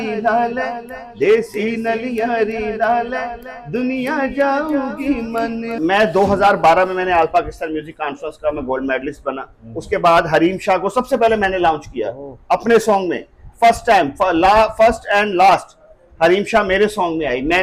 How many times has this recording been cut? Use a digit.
1